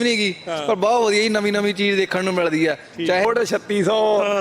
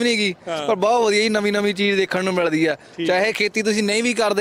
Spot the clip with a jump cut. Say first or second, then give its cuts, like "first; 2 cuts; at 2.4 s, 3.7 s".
first; 1 cut; at 3.3 s